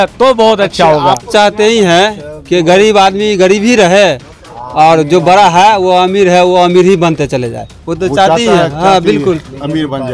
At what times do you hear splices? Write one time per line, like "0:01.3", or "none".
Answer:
0:01.3